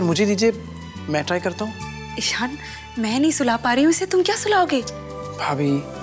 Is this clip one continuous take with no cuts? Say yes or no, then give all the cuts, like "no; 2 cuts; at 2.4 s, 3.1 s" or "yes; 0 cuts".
yes; 0 cuts